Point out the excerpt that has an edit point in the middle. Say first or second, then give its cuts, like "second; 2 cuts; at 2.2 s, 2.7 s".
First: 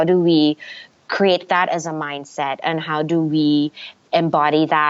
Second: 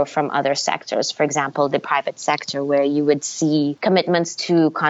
second; 1 cut; at 3.8 s